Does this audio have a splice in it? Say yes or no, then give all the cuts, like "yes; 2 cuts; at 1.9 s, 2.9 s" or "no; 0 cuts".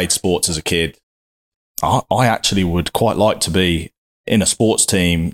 yes; 1 cut; at 1.2 s